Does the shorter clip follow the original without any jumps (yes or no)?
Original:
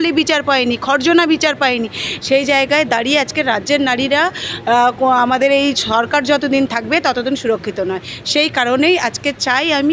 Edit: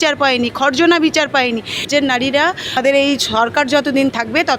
no